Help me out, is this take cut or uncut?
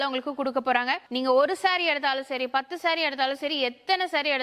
cut